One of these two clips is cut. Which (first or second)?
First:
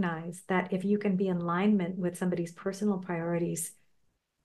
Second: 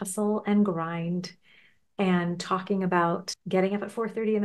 second